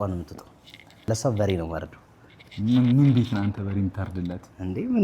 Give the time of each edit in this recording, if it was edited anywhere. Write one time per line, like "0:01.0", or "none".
0:01.1